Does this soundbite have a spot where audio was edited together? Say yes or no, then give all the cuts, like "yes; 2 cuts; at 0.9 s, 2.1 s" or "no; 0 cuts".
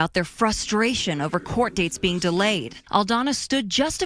yes; 1 cut; at 2.7 s